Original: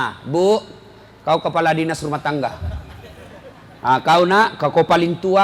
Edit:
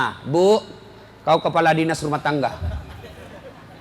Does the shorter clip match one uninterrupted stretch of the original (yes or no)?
yes